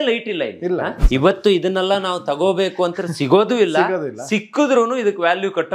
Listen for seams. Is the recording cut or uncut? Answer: cut